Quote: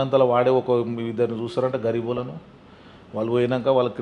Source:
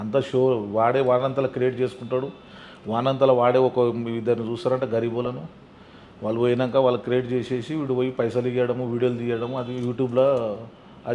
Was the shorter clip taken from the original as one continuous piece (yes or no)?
yes